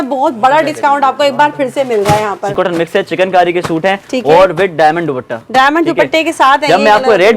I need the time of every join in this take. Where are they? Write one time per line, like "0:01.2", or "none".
0:02.5